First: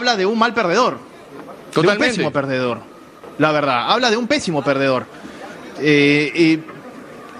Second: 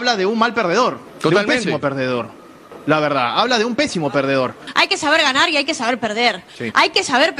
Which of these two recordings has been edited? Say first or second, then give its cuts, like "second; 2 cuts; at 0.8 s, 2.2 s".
second; 2 cuts; at 1.1 s, 4.6 s